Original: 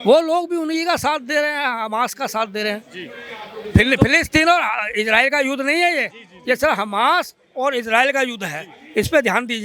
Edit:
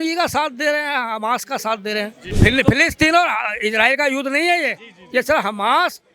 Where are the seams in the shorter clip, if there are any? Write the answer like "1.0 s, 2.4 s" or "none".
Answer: 2.2 s